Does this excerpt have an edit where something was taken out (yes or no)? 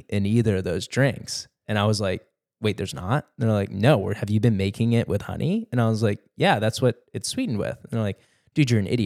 no